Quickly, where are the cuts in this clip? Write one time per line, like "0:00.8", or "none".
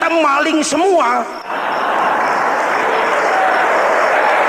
0:01.4

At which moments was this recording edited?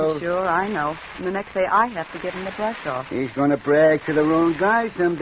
none

